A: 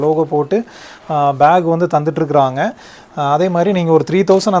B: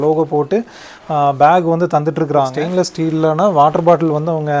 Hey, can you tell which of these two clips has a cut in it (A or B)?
B